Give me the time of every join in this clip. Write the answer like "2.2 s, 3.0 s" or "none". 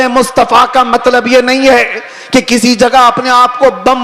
none